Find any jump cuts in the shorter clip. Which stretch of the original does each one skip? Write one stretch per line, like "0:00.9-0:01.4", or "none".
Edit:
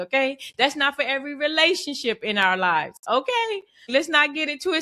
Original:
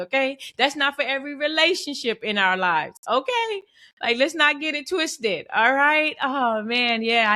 0:03.9-0:04.2